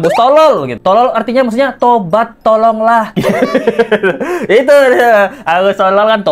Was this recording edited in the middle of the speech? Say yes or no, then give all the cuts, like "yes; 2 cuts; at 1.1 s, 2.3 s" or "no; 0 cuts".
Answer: no; 0 cuts